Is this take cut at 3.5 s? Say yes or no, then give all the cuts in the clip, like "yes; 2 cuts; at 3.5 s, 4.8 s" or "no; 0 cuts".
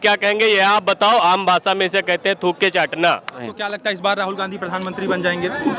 yes; 1 cut; at 3.5 s